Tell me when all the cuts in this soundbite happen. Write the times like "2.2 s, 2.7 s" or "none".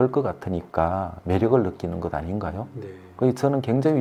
none